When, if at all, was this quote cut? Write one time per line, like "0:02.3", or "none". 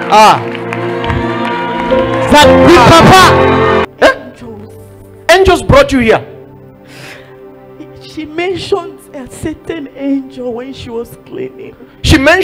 0:03.9